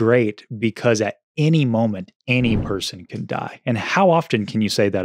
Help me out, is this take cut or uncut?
uncut